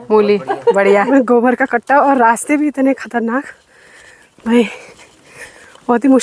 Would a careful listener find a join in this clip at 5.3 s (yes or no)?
no